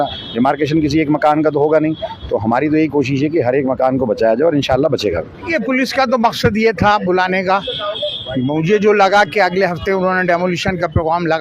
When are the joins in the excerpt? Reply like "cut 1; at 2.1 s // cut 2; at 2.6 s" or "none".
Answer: cut 1; at 5.4 s